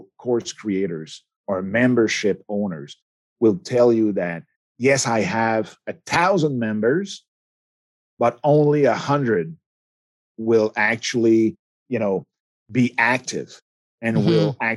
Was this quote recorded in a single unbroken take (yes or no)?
yes